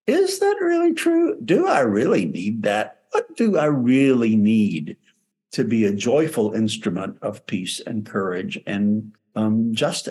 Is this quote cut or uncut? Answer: cut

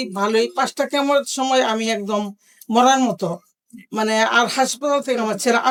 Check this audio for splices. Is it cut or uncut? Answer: uncut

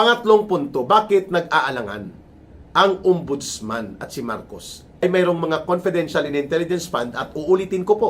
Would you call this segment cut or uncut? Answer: cut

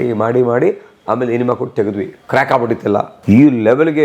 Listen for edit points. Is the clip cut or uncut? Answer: cut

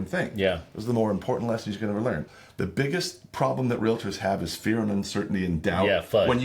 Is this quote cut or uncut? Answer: cut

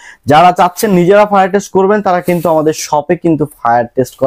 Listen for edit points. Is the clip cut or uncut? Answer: uncut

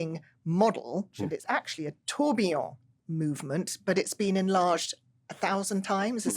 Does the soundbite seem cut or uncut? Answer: cut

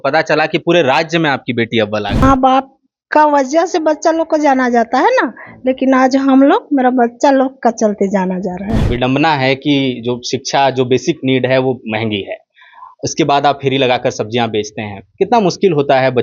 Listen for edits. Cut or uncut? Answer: cut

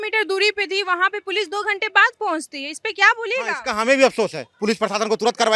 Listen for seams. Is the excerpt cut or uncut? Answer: cut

